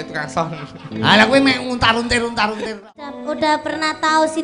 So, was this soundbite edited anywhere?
yes; 1 cut; at 3.2 s

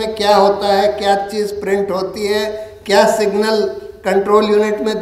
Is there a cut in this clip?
no; 0 cuts

